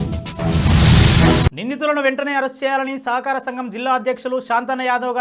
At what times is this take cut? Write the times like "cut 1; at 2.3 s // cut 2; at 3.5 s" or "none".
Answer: cut 1; at 1.4 s